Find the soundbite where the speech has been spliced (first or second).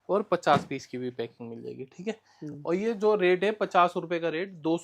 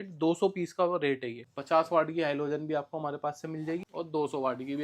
second